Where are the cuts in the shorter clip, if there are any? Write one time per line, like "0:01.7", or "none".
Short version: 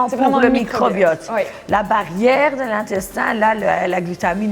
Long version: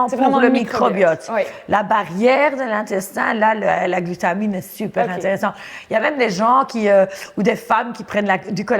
none